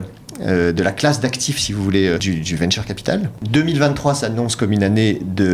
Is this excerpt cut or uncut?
cut